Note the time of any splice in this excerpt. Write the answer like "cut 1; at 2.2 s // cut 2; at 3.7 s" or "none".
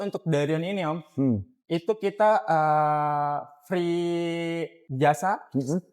cut 1; at 4.8 s